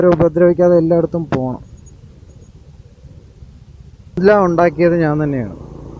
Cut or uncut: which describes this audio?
cut